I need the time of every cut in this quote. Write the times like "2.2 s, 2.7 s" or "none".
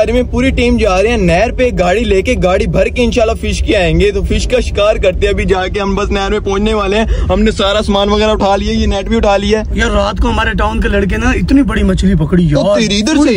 none